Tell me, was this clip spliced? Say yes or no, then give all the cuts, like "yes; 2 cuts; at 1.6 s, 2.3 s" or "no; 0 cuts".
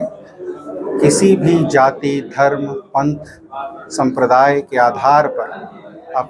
no; 0 cuts